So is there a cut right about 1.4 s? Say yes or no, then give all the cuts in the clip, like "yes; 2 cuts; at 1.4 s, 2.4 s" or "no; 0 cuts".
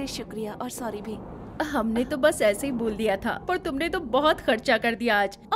yes; 1 cut; at 1.4 s